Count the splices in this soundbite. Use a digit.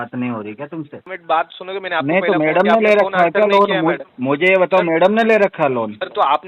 1